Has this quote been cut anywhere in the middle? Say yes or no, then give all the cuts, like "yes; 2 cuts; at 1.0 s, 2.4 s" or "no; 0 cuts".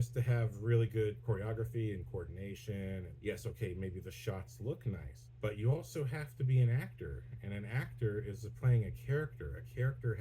yes; 3 cuts; at 1.2 s, 3.1 s, 5.2 s